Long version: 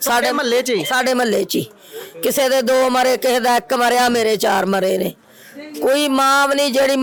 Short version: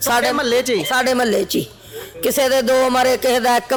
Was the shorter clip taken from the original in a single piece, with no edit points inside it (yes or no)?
yes